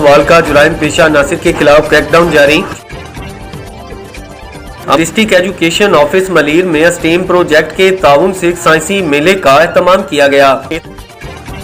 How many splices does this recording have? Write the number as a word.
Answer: three